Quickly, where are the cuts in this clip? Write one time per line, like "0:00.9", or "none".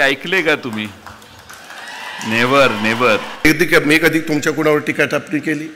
0:03.4